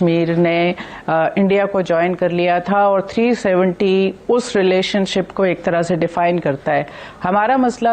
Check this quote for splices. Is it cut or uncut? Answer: uncut